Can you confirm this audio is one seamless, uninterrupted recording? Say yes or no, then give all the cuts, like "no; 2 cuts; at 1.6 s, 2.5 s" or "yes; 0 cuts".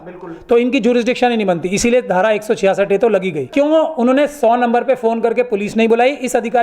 no; 1 cut; at 3.5 s